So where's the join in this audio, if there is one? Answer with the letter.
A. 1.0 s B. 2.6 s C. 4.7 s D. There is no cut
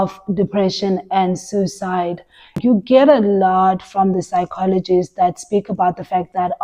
B